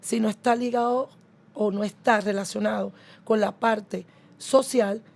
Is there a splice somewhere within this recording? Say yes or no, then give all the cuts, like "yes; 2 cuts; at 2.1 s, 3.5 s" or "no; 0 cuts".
no; 0 cuts